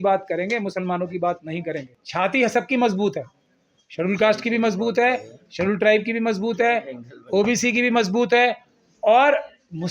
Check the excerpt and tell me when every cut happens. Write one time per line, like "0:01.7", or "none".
0:01.9

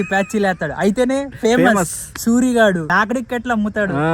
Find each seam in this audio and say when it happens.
0:02.9

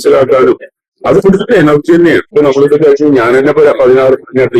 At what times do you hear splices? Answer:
0:02.3

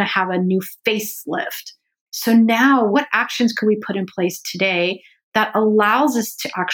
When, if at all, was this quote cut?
0:02.0
0:02.9

